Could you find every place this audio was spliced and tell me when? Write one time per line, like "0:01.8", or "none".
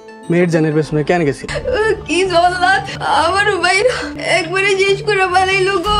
0:01.5
0:02.9
0:04.1